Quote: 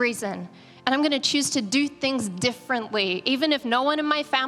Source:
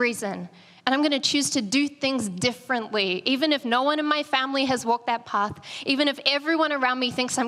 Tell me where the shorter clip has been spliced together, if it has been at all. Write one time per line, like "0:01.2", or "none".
none